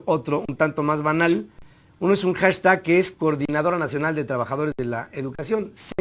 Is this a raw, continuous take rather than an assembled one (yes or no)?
no